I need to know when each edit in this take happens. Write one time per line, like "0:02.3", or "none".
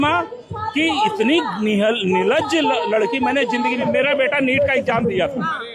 0:03.8

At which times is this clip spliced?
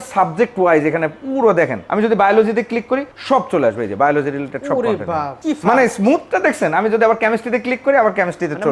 0:01.8
0:03.1
0:05.4

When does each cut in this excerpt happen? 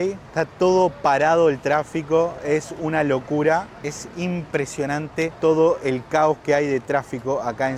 none

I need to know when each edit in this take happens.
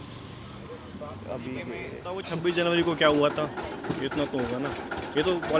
0:02.3

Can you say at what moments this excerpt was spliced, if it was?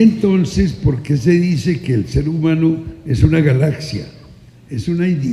none

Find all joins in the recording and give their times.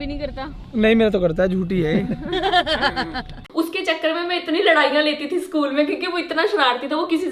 0:03.4

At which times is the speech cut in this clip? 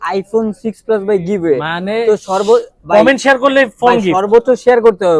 none

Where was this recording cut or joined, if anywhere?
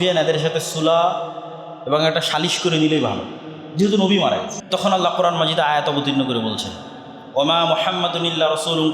0:04.6

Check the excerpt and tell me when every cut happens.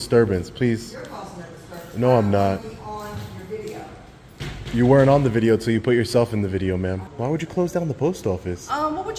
0:07.1

